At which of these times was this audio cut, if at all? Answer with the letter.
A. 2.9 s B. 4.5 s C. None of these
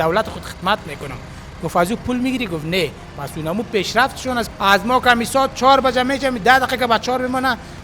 B